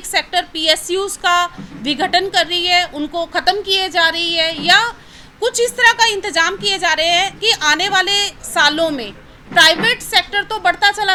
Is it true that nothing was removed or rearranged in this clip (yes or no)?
yes